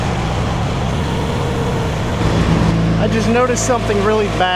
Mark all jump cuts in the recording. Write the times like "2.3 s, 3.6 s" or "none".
2.6 s